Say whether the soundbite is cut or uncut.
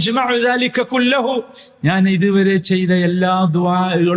uncut